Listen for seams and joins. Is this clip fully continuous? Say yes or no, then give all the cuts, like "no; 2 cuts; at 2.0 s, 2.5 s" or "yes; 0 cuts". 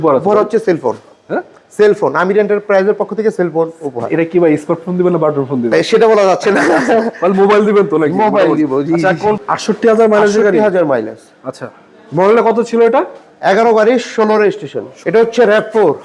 no; 2 cuts; at 9.4 s, 14.9 s